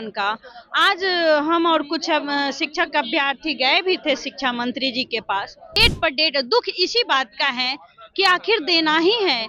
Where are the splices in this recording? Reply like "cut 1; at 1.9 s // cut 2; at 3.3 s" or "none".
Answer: cut 1; at 5.7 s

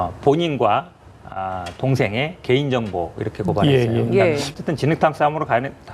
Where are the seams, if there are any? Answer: cut 1; at 4.5 s

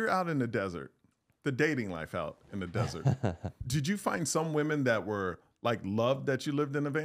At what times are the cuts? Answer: cut 1; at 3.7 s

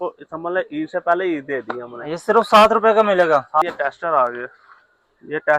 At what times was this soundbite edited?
cut 1; at 3.6 s

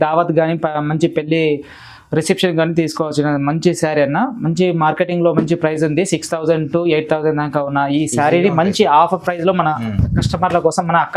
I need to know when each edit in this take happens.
none

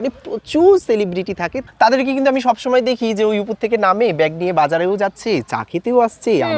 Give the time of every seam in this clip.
cut 1; at 1.6 s

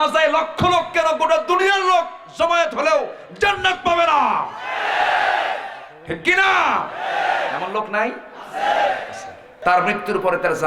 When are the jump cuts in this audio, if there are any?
cut 1; at 9.5 s

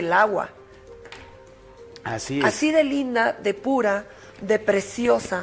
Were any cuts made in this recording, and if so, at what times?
none

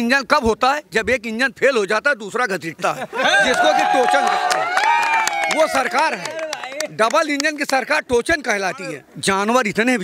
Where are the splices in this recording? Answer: cut 1; at 9.1 s

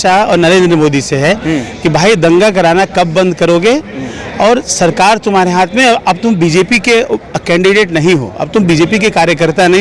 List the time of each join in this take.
none

